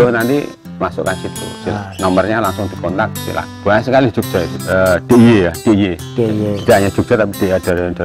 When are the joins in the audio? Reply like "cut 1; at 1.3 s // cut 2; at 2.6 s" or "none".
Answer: cut 1; at 3.5 s // cut 2; at 4.6 s